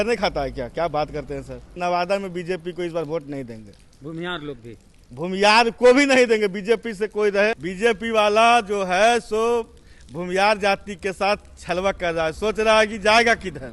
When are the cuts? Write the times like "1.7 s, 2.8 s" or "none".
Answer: 1.8 s, 7.7 s